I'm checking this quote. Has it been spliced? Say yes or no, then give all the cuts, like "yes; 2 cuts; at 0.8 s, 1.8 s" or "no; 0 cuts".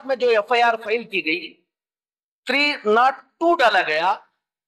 no; 0 cuts